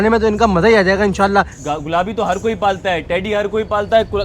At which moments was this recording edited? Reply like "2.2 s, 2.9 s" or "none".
1.6 s